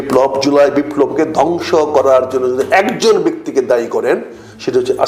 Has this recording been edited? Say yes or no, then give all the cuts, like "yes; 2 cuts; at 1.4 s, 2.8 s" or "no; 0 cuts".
no; 0 cuts